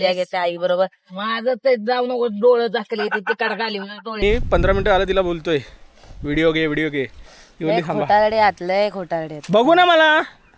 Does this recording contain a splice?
yes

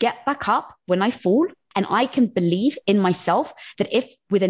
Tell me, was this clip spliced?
yes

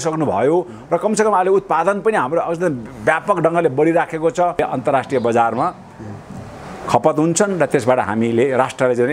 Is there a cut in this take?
yes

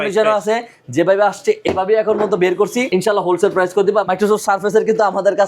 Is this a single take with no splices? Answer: no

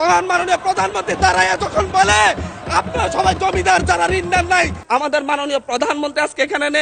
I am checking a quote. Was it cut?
yes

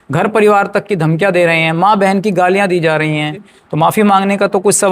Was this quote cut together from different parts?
yes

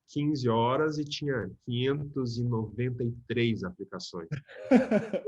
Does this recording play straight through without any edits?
yes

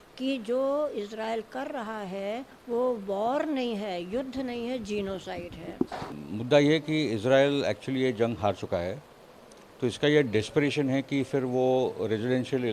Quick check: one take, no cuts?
no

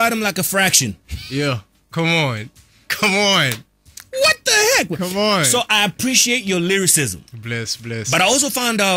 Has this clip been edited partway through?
no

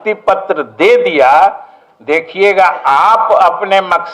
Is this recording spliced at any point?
no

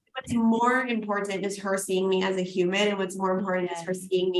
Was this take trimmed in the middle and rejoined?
no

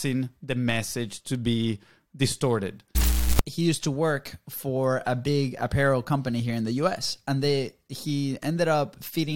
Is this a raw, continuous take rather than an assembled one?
no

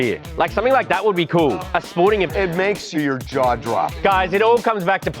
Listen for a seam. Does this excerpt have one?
yes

